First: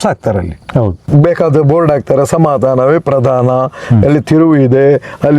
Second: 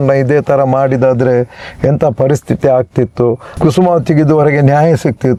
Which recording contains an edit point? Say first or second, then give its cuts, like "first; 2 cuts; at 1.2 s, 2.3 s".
first; 1 cut; at 1.0 s